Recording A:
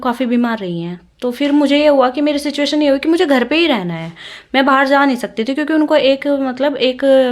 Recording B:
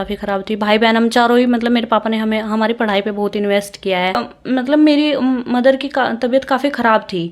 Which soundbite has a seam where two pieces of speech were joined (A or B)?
B